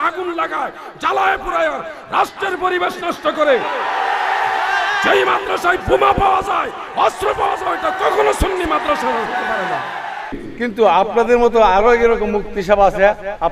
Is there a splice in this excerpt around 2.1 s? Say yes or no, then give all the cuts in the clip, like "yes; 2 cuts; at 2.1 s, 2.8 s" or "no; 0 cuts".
no; 1 cut; at 10.4 s